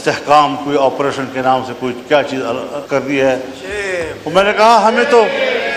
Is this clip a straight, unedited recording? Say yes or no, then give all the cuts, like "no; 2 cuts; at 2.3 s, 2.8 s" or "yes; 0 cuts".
no; 1 cut; at 2.8 s